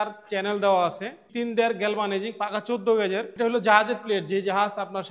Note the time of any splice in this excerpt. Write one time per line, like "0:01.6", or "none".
0:01.2
0:03.3